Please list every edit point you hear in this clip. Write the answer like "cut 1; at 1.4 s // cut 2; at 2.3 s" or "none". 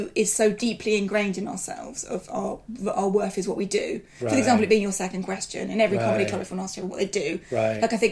none

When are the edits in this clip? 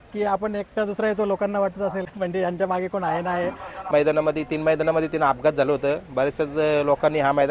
cut 1; at 2.1 s // cut 2; at 3.9 s

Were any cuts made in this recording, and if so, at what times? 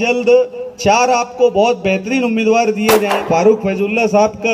cut 1; at 3.2 s

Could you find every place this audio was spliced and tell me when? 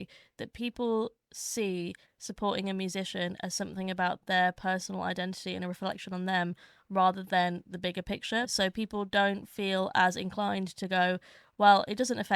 cut 1; at 8.5 s

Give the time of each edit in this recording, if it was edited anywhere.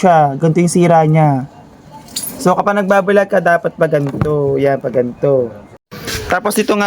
cut 1; at 5.7 s

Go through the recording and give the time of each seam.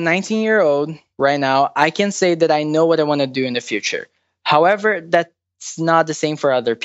cut 1; at 1.0 s

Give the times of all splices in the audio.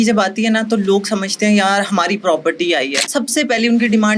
cut 1; at 3.0 s

